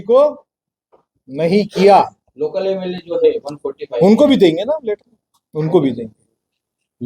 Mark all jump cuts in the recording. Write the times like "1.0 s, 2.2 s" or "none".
2.5 s